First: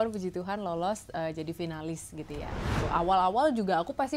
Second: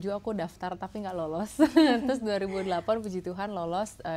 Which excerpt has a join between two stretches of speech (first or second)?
first